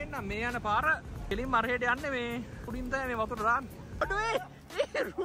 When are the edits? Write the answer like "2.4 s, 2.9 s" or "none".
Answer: 1.2 s, 2.7 s, 4.0 s